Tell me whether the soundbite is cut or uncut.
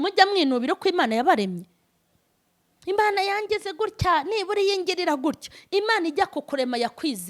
uncut